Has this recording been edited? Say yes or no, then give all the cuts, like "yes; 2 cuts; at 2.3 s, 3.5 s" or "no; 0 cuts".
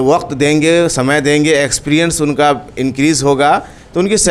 no; 0 cuts